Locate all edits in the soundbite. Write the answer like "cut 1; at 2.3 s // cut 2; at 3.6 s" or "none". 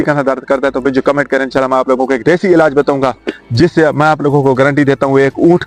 none